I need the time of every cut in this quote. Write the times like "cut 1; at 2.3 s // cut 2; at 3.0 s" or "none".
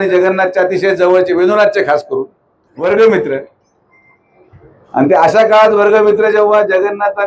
cut 1; at 2.7 s